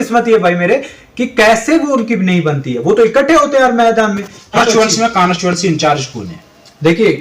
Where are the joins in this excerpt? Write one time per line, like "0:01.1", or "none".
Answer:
0:04.6

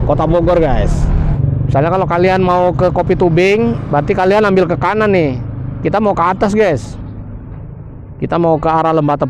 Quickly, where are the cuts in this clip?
0:01.3

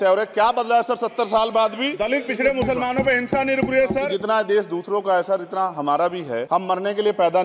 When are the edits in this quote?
0:01.9
0:04.1
0:06.5

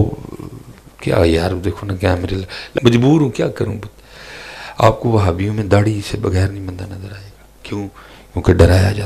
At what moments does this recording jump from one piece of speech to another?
0:02.7

